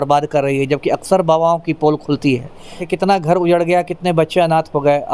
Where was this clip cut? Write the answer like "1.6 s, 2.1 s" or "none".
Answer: 2.8 s